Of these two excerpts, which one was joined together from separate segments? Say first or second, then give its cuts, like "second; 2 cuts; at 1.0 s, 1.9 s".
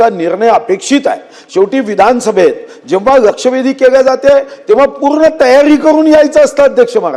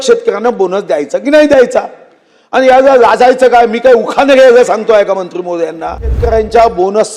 second; 1 cut; at 6.2 s